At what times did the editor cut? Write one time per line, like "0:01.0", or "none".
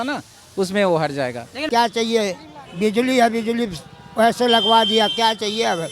0:01.6